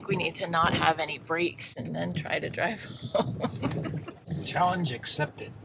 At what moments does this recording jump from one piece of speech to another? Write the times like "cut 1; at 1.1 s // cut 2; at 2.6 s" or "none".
cut 1; at 4.2 s